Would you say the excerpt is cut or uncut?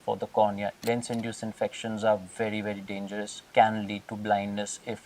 cut